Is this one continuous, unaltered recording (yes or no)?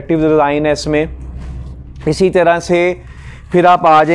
yes